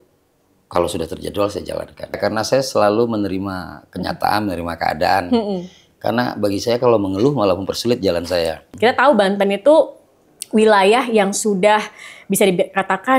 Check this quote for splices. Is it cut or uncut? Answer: cut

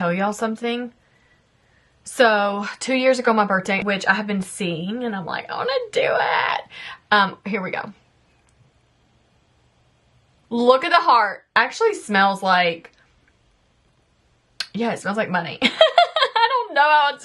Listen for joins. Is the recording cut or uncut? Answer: cut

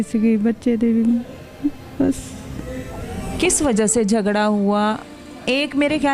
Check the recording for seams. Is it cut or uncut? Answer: uncut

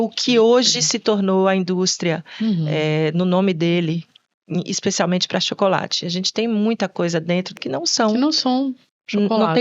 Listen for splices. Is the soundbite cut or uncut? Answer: cut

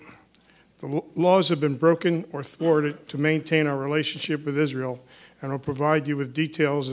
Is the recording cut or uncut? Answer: uncut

